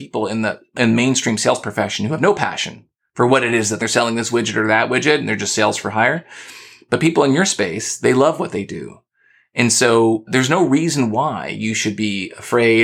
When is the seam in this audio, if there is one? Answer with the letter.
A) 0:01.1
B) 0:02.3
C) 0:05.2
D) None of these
D